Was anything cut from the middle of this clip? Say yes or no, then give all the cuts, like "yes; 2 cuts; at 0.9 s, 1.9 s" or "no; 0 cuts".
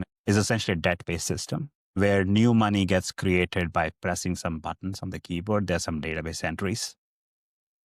no; 0 cuts